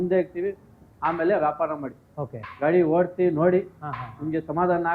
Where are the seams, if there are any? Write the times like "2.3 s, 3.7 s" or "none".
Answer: none

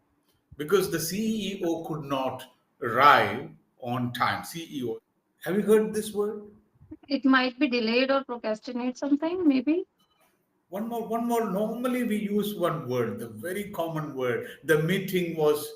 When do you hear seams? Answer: 4.9 s

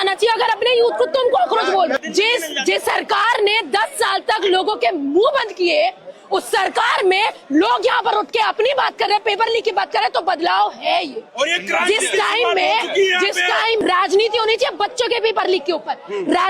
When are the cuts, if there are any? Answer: 2.0 s, 13.8 s

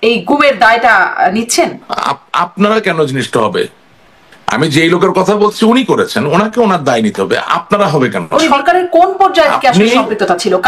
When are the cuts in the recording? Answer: 1.9 s, 8.5 s

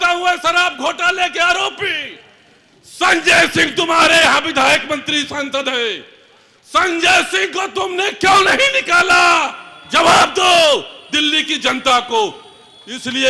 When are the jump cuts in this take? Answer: none

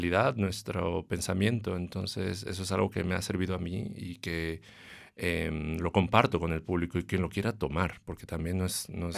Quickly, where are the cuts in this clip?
none

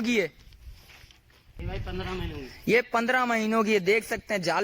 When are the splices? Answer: 1.4 s

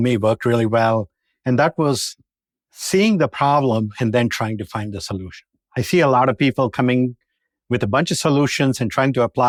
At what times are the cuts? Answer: none

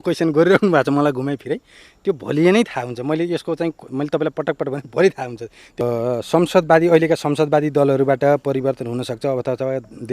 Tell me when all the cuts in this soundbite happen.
5.8 s

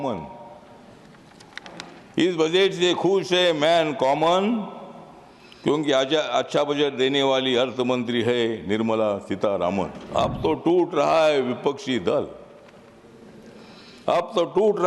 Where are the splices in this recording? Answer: 10.0 s

